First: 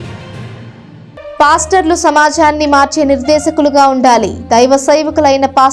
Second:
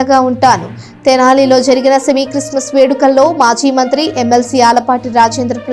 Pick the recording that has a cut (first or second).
first